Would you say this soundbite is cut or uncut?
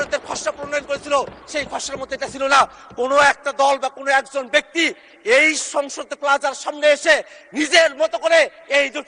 uncut